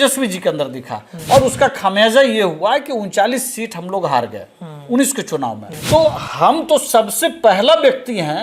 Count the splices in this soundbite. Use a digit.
1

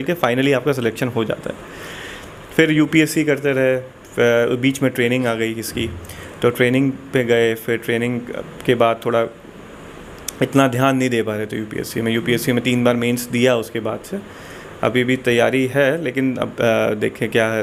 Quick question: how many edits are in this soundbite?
0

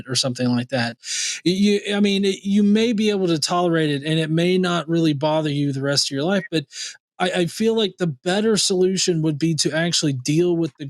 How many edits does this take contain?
0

